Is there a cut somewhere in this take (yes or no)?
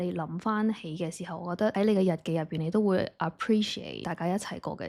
yes